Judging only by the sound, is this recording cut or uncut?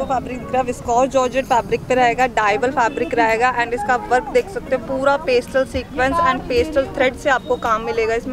uncut